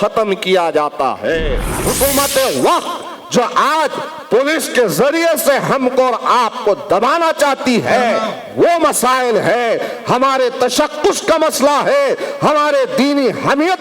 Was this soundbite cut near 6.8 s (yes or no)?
no